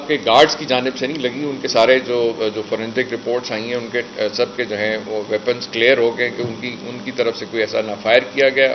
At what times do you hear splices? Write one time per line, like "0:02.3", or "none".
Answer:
none